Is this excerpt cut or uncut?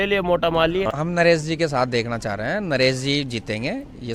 cut